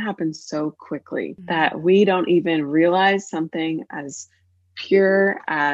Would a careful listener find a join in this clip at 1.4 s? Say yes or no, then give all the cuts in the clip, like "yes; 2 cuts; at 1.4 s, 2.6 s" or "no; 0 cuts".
yes; 1 cut; at 1.4 s